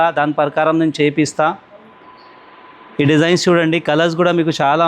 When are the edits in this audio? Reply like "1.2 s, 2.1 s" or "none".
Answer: none